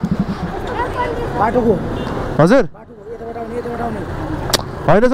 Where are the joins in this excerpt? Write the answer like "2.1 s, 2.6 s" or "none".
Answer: none